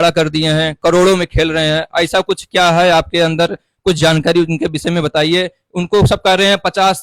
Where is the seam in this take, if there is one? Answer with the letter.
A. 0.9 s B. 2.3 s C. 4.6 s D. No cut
D